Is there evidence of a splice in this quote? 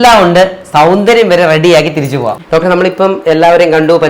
yes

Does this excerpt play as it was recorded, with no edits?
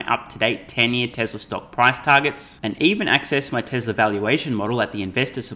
yes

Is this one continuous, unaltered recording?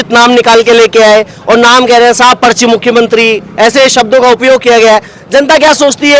yes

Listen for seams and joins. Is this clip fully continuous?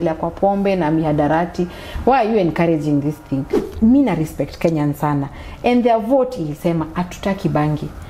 no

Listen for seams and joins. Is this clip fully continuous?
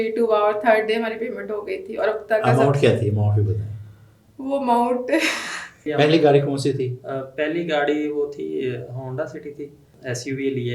no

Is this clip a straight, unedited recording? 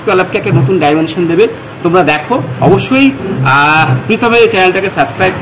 yes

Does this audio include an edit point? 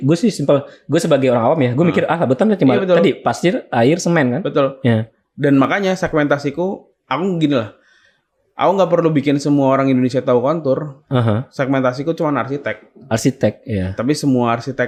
no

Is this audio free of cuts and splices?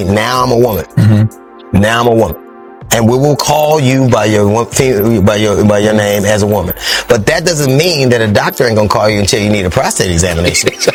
yes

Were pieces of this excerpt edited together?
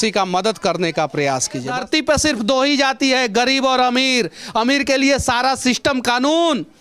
yes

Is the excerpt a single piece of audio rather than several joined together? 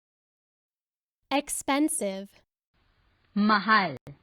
yes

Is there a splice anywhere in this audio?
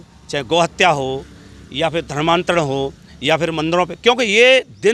no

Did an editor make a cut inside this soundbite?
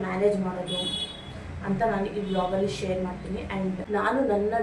no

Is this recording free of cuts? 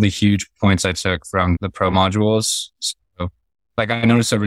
no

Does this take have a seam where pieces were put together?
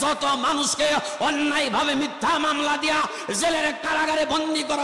no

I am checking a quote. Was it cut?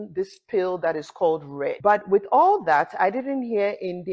no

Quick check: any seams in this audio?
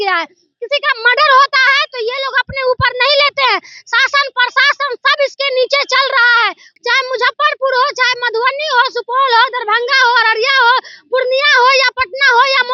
yes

